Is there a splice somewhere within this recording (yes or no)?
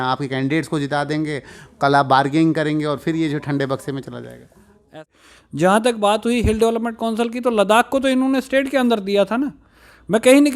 yes